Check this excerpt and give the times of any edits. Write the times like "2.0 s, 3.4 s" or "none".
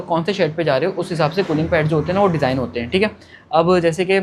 none